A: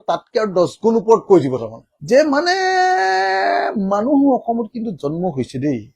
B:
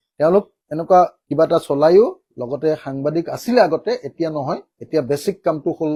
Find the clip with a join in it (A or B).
A